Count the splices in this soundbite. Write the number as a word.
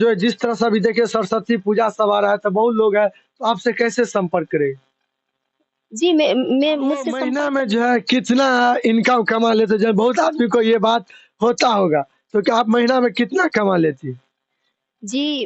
one